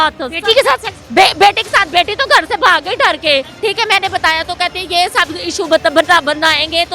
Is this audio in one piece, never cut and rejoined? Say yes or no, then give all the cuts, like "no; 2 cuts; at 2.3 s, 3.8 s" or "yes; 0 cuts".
no; 2 cuts; at 1.0 s, 3.5 s